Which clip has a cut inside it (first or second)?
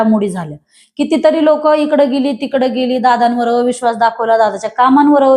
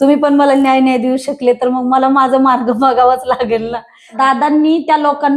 second